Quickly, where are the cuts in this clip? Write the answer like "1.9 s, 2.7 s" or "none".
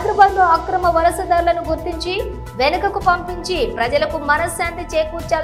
none